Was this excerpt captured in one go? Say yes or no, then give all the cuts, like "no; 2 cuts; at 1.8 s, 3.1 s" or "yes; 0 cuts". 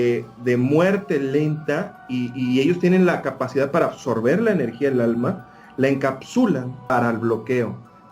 no; 1 cut; at 6.8 s